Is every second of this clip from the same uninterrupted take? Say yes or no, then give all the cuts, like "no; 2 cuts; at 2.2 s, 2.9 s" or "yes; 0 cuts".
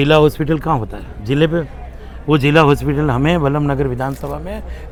yes; 0 cuts